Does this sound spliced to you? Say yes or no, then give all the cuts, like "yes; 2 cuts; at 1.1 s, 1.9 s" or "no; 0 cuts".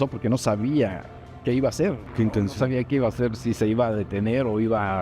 no; 0 cuts